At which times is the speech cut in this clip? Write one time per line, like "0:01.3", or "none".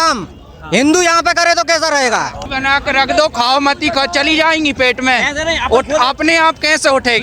0:02.4